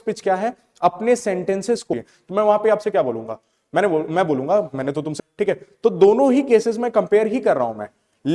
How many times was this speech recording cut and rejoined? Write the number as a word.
two